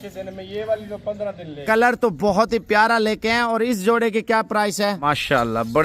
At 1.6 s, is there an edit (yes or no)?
yes